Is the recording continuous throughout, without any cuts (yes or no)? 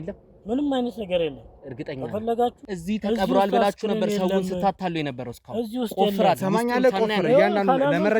no